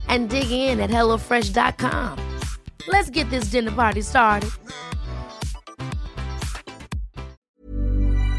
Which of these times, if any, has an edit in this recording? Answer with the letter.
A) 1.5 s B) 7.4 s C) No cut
B